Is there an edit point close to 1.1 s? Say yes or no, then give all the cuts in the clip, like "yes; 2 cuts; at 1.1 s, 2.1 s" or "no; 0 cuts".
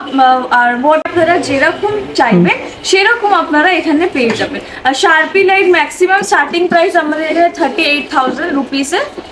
yes; 1 cut; at 1.1 s